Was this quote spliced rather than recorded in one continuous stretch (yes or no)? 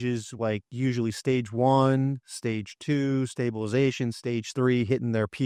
no